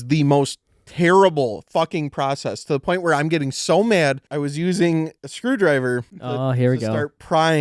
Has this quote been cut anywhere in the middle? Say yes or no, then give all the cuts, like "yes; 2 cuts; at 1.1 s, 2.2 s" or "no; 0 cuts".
yes; 3 cuts; at 4.2 s, 5.2 s, 6.1 s